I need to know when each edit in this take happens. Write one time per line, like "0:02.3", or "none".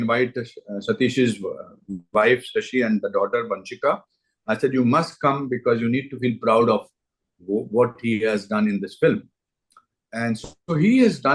none